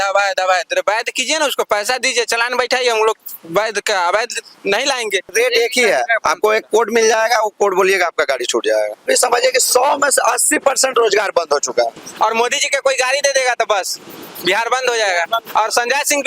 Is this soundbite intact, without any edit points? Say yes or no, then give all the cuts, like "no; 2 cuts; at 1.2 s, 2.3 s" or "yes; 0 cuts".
no; 4 cuts; at 5.3 s, 9.0 s, 12.0 s, 15.5 s